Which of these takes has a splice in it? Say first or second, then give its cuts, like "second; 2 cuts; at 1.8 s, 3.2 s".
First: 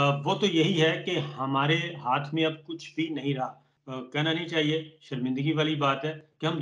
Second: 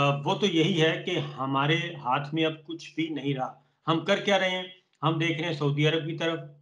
first; 1 cut; at 3.7 s